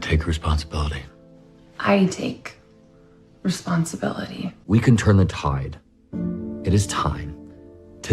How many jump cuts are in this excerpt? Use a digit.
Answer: 1